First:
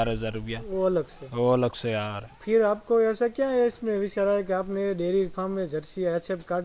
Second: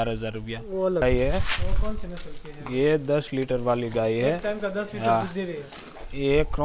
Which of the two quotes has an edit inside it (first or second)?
second